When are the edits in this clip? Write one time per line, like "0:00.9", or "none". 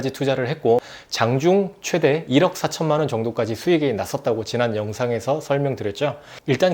0:01.0